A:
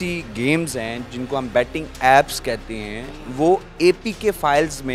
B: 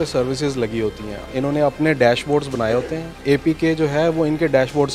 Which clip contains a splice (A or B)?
B